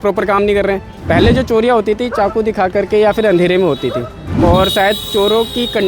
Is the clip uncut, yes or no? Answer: no